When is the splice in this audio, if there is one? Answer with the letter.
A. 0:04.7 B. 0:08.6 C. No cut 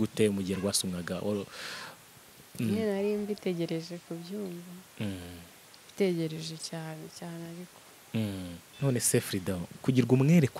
B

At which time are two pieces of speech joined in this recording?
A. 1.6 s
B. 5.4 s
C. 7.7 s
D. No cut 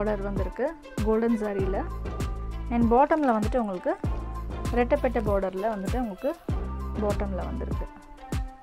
C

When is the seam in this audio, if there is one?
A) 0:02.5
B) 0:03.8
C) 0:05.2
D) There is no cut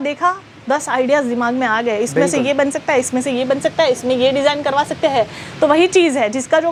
D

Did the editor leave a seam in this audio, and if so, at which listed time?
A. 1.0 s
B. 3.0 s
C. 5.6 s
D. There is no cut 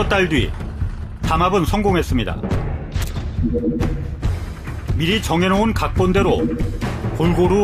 C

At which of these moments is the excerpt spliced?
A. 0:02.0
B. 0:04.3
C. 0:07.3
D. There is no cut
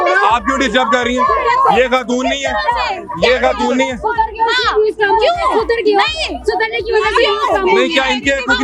D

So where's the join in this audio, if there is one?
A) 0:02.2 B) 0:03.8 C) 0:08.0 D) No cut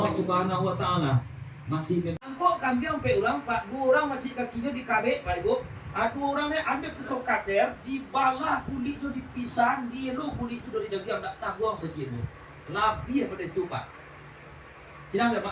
A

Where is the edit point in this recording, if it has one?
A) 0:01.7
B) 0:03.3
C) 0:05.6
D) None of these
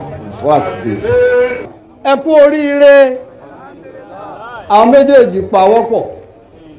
A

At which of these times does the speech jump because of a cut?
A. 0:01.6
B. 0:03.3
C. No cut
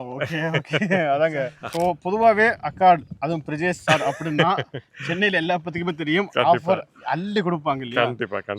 A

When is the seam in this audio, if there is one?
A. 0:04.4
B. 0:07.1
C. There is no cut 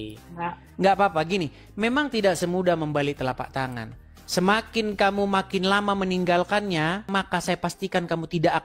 B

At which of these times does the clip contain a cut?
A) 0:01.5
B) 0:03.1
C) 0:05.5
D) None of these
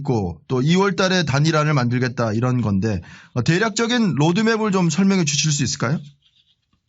A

